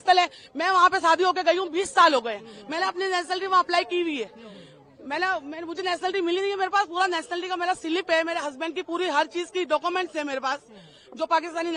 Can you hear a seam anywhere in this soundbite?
no; 0 cuts

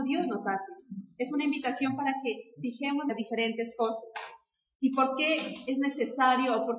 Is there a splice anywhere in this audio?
no; 0 cuts

